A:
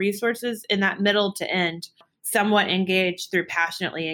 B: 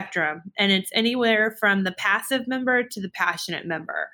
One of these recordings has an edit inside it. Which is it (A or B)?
A